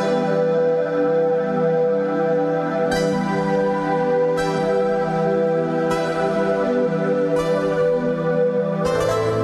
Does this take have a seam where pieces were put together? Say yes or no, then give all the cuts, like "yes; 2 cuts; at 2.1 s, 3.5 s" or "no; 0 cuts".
no; 0 cuts